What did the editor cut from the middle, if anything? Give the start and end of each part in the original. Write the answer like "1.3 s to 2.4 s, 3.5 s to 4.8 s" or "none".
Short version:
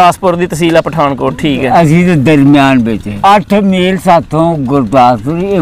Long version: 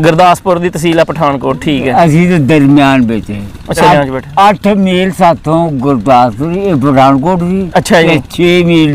3.3 s to 4.2 s